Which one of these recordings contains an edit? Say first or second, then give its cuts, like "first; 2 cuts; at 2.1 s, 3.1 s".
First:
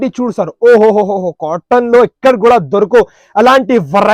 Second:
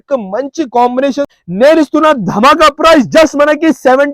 second; 1 cut; at 1.3 s